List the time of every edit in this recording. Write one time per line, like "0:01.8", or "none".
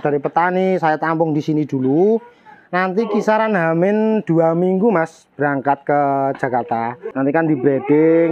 0:07.1